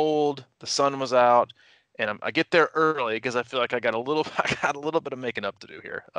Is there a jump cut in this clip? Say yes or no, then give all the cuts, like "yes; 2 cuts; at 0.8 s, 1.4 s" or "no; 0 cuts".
no; 0 cuts